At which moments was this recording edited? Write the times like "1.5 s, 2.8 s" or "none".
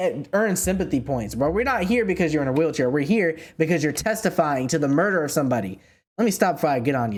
none